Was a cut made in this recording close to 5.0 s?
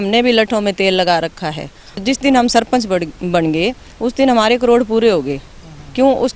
no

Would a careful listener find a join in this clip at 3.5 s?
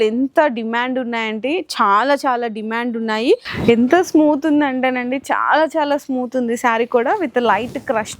yes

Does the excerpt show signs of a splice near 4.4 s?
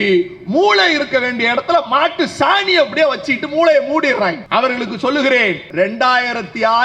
yes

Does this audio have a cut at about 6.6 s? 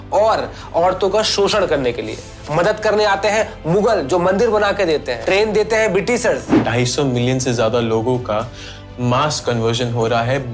yes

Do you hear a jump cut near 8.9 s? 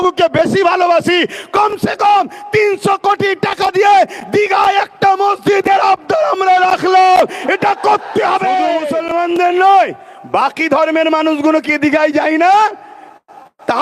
yes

